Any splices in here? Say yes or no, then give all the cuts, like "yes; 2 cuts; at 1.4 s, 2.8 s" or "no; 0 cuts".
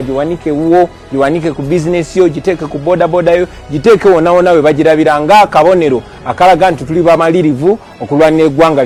no; 0 cuts